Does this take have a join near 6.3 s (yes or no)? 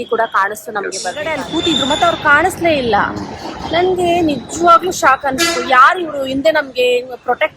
no